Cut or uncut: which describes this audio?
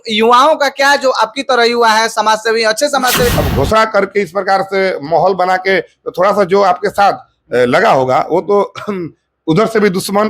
cut